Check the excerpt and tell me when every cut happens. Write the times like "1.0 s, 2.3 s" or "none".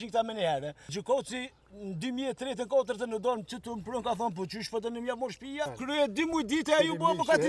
0.9 s, 5.8 s